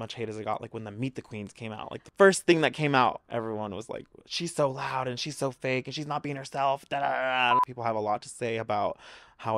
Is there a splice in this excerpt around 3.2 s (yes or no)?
yes